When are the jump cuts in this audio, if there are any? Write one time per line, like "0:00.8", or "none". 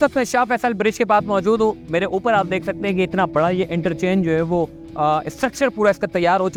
none

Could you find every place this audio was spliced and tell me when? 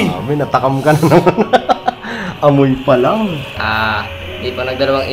0:03.5

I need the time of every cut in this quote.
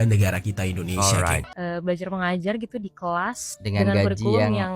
0:01.4

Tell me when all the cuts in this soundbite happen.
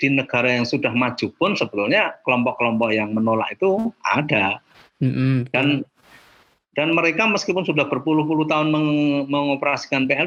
none

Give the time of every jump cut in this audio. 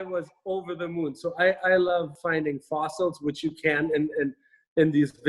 0:02.2

